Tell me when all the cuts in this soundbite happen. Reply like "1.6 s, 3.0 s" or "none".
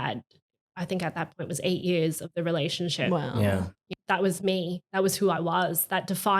3.8 s